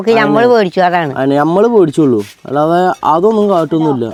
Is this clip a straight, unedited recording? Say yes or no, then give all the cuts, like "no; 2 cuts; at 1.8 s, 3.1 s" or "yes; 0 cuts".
yes; 0 cuts